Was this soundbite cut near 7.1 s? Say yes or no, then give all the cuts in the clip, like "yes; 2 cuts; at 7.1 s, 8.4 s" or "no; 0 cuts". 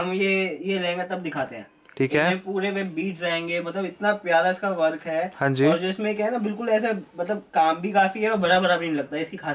no; 0 cuts